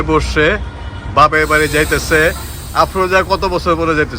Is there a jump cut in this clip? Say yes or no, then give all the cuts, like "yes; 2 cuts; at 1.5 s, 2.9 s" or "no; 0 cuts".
no; 0 cuts